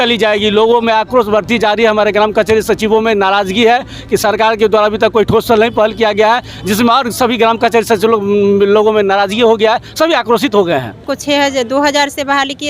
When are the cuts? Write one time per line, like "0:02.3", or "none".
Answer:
0:11.0